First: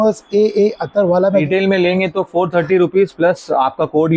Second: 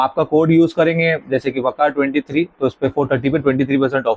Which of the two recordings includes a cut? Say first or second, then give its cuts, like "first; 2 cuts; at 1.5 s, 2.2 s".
first; 1 cut; at 1.4 s